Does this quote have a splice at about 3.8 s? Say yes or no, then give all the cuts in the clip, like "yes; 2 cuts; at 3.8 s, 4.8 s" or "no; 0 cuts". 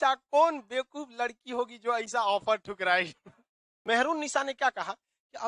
yes; 1 cut; at 3.8 s